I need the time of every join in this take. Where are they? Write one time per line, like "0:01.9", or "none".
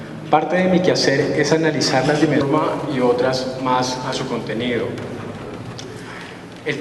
none